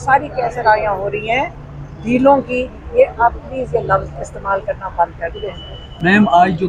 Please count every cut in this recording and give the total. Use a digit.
0